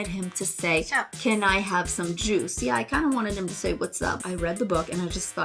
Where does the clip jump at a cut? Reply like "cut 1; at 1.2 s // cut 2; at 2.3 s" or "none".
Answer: cut 1; at 4.2 s